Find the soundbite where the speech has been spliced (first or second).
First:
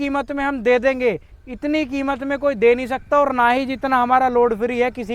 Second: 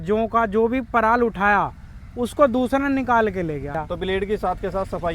second